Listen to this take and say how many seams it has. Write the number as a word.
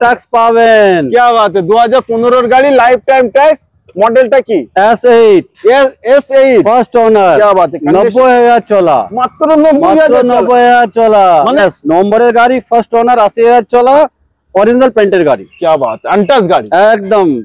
one